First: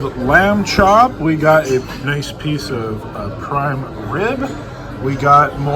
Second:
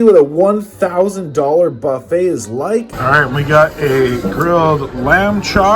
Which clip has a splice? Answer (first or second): second